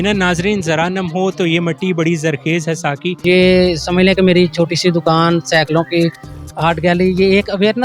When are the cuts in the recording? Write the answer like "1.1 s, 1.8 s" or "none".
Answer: 3.2 s